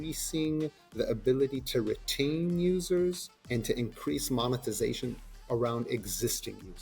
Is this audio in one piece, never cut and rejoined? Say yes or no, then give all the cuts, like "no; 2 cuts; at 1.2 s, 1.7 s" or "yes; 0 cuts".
no; 2 cuts; at 3.3 s, 5.3 s